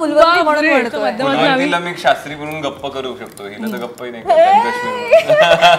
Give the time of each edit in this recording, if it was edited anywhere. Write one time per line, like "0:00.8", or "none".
0:01.1

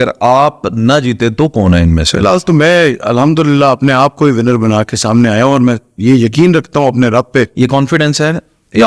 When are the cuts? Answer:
none

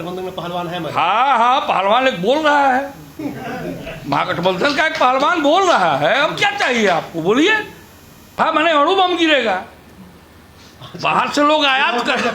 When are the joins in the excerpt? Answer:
0:08.4

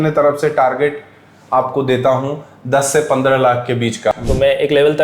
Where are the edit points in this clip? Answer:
0:04.1

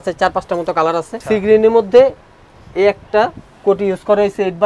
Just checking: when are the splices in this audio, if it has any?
0:01.1

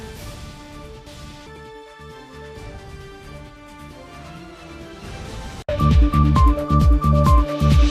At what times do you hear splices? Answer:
0:05.7

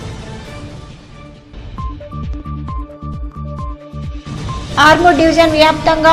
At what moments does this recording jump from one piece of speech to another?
0:04.4

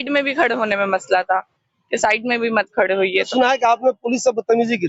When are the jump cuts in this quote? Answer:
0:03.3

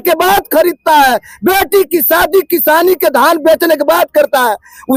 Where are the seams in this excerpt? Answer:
none

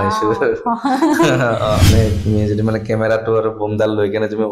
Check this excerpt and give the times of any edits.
0:01.9

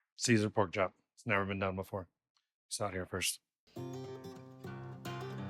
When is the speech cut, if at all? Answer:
0:03.8

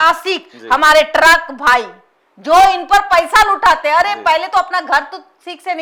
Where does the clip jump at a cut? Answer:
none

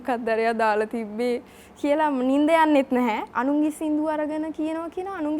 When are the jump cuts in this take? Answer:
0:03.3

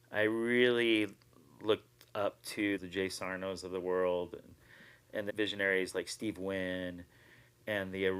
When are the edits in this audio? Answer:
0:02.8
0:05.3

